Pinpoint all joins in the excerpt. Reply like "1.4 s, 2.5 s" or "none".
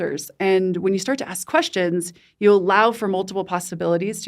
none